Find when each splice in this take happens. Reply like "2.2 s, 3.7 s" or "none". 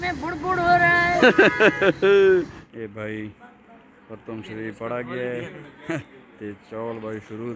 2.6 s